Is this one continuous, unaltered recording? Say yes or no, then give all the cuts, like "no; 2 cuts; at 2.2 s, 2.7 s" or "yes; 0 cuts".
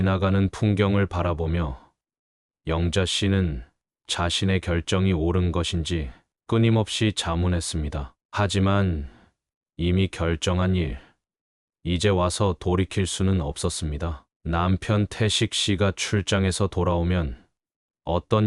no; 1 cut; at 14.3 s